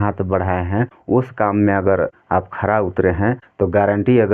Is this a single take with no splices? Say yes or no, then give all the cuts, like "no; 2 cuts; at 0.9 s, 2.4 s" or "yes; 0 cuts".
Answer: no; 3 cuts; at 1.0 s, 2.2 s, 3.5 s